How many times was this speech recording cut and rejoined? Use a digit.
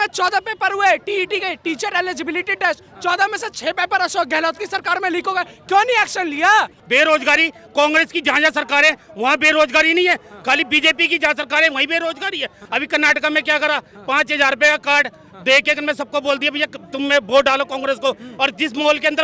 2